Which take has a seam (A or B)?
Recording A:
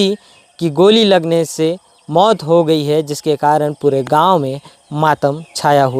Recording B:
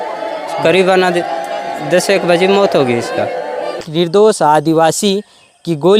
B